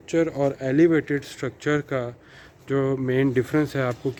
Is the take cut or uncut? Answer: uncut